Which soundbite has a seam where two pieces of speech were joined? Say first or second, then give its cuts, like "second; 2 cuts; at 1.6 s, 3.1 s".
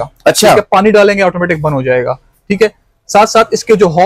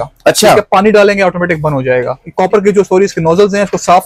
second; 1 cut; at 2.2 s